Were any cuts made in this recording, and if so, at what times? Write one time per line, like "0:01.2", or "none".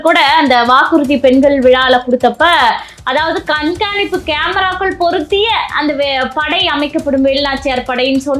none